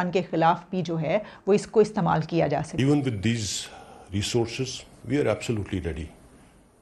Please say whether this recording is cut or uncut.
cut